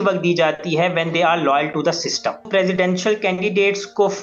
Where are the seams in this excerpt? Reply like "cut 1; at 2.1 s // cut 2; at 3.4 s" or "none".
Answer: cut 1; at 2.5 s